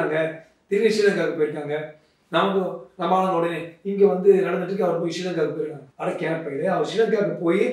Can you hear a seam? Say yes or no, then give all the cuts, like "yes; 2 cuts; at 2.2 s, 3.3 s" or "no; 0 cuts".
yes; 1 cut; at 5.8 s